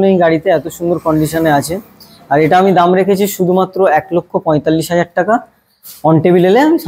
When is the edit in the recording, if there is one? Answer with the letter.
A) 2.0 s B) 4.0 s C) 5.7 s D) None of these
D